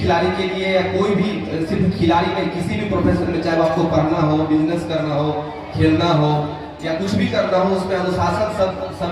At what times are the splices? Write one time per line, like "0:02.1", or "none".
none